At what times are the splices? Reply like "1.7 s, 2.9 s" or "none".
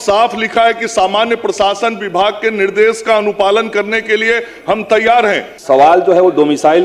5.5 s